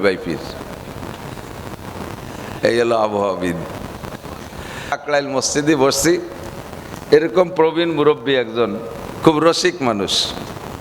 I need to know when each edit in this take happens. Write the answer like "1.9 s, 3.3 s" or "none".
5.0 s